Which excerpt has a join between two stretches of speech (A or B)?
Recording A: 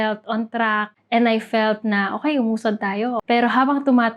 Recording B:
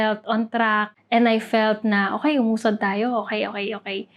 A